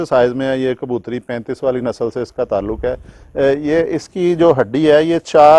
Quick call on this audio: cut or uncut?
uncut